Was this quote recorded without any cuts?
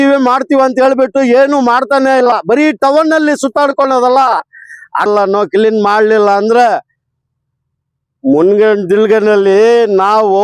no; 1 cut; at 5.1 s

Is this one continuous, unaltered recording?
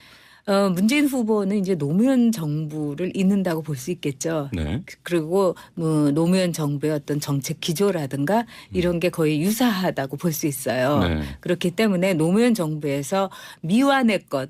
yes; 0 cuts

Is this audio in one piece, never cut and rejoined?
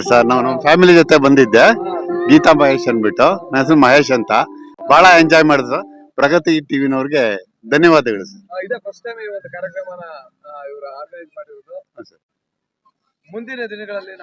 yes; 0 cuts

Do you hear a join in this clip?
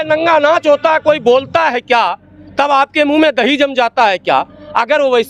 no; 0 cuts

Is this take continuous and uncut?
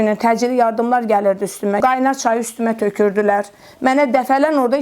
no; 1 cut; at 1.8 s

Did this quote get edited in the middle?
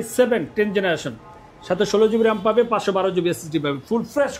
no; 0 cuts

